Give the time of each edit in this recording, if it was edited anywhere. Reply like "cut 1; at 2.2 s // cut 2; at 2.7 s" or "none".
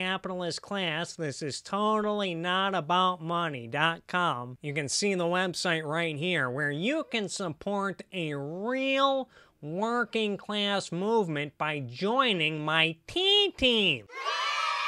cut 1; at 4.5 s